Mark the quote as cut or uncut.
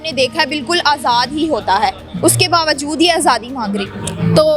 uncut